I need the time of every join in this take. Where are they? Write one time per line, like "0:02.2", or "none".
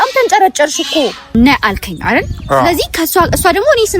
0:01.3